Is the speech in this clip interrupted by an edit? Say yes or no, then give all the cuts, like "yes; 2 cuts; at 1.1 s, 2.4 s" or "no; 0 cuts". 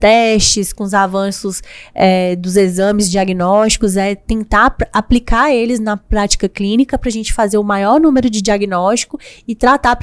no; 0 cuts